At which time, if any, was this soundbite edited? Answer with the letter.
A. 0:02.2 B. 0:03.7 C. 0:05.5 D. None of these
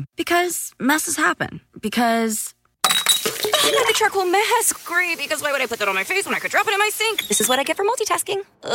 A